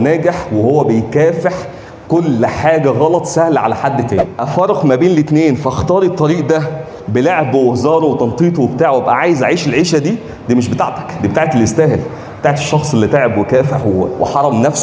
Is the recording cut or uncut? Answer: cut